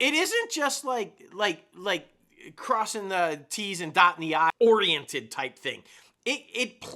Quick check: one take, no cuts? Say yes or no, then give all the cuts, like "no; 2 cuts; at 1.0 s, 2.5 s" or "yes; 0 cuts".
no; 1 cut; at 4.5 s